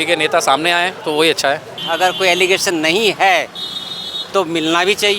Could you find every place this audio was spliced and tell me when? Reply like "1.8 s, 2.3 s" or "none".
1.0 s, 1.7 s